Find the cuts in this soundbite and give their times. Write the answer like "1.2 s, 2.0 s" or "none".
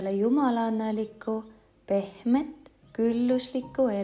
none